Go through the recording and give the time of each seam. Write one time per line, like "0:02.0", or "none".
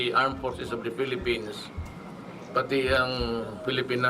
0:01.0